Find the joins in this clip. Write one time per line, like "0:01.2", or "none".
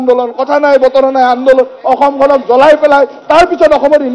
none